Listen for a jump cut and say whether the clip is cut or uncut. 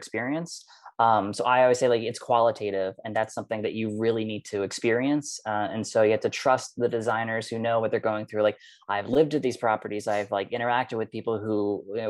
uncut